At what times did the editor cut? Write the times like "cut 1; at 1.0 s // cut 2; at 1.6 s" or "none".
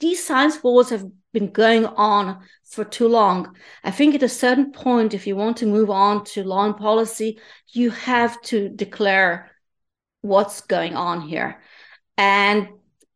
none